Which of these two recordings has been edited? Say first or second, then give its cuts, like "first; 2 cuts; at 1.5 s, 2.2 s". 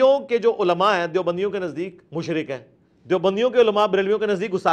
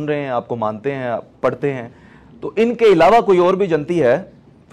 first; 1 cut; at 2.0 s